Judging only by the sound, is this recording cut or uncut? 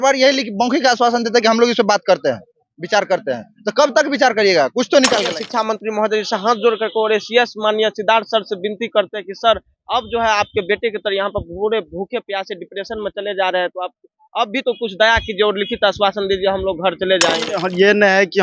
cut